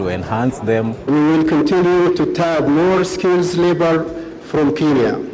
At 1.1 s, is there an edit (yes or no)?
yes